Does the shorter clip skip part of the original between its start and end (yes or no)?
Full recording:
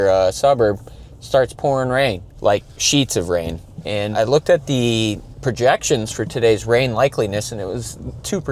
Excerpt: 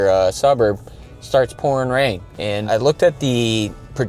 yes